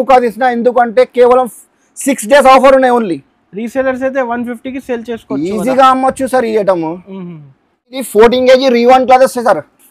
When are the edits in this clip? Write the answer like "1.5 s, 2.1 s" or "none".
none